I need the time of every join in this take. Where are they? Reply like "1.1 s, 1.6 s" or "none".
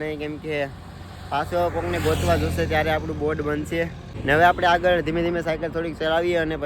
4.1 s